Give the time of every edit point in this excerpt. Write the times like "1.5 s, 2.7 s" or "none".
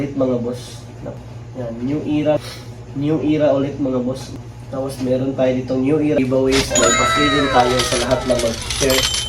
2.4 s, 6.2 s